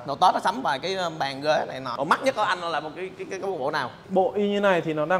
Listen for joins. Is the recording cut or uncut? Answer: cut